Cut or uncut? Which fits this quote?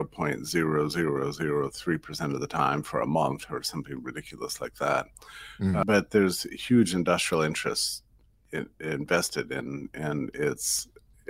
uncut